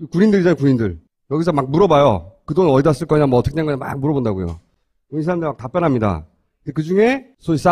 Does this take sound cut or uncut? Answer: cut